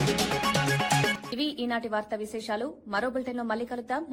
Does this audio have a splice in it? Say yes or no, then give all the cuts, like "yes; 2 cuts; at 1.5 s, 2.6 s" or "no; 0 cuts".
no; 0 cuts